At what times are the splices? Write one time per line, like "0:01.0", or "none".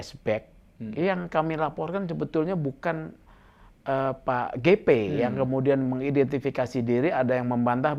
none